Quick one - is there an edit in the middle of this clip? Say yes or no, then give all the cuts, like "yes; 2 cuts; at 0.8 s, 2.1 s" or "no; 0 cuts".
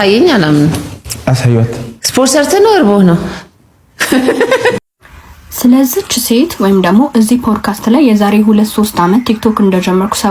yes; 1 cut; at 4.8 s